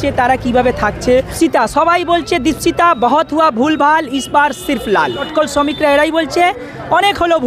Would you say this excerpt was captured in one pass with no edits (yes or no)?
no